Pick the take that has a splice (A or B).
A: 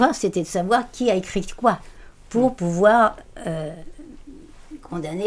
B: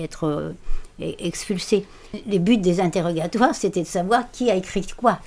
B